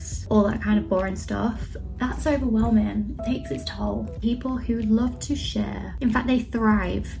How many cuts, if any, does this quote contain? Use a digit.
2